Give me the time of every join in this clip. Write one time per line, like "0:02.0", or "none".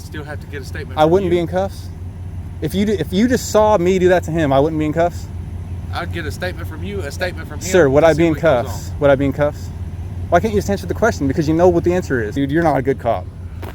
0:12.3